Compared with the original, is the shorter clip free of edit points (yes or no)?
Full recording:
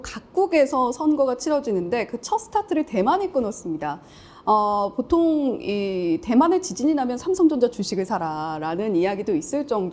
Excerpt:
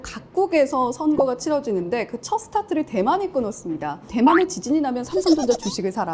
no